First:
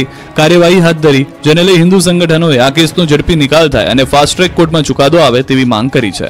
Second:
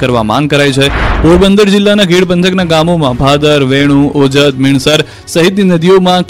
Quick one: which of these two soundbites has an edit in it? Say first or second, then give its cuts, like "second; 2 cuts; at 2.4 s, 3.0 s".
second; 1 cut; at 5.2 s